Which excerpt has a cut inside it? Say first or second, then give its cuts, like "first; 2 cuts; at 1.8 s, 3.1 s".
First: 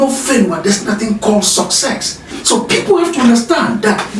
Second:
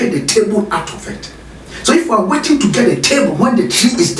first; 1 cut; at 2.3 s